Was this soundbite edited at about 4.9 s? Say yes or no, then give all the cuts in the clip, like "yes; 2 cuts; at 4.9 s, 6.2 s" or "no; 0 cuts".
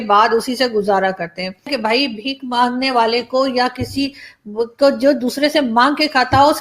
no; 1 cut; at 1.7 s